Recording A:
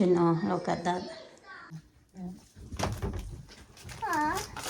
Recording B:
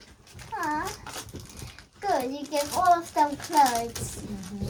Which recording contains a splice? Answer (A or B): A